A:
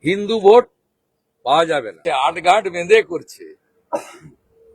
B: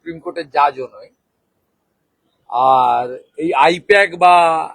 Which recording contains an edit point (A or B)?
A